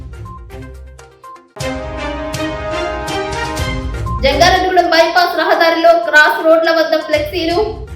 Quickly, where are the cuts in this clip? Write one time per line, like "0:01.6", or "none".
0:01.0
0:03.6